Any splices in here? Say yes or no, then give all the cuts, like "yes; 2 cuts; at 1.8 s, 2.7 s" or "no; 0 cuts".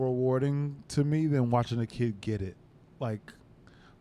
yes; 1 cut; at 2.7 s